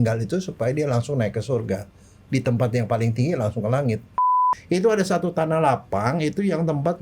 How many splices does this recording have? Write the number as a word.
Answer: one